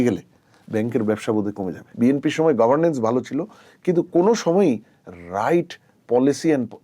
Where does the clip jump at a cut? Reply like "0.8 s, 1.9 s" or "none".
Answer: 1.9 s